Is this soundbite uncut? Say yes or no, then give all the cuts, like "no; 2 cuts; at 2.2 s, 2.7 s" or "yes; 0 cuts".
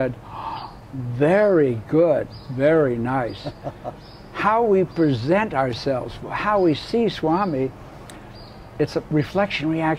yes; 0 cuts